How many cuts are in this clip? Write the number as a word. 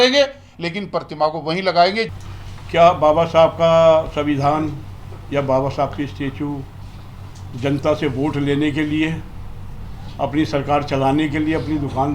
zero